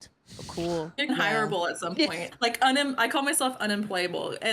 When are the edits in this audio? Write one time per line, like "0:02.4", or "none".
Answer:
0:01.1